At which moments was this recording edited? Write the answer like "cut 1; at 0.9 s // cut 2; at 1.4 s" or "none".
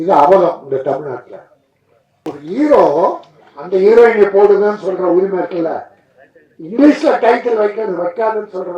cut 1; at 2.3 s

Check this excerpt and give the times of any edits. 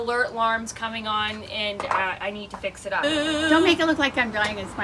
cut 1; at 3.0 s

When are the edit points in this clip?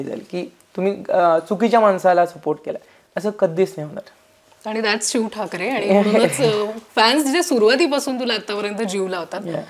none

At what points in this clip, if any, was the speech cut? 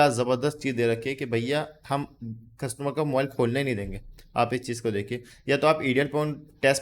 cut 1; at 5.3 s

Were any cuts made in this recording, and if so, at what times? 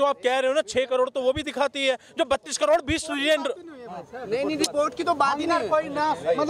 none

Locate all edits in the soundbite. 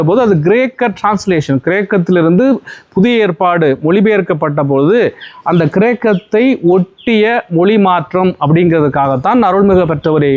none

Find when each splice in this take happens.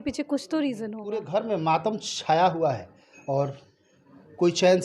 cut 1; at 1.0 s

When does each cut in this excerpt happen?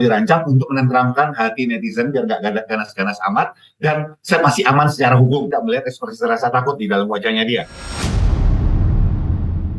none

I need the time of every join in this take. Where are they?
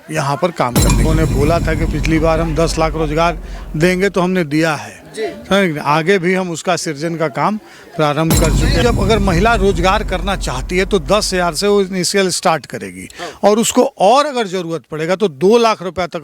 cut 1; at 1.0 s // cut 2; at 8.8 s

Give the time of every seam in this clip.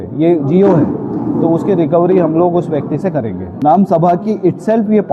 cut 1; at 3.4 s

